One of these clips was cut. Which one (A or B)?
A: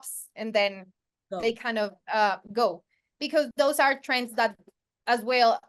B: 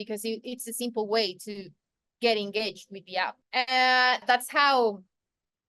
B